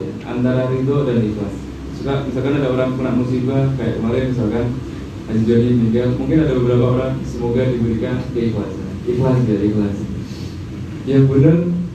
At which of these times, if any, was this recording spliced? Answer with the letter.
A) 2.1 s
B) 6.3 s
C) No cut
C